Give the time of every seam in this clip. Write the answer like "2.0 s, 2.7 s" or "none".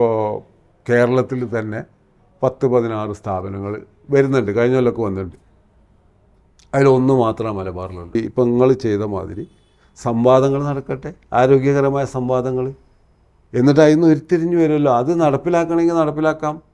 8.1 s